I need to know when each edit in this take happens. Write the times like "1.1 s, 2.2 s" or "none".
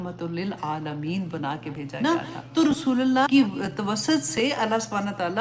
1.9 s, 3.3 s